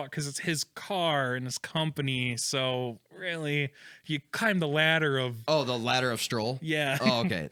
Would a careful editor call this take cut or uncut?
uncut